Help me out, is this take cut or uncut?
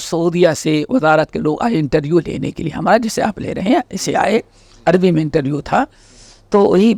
uncut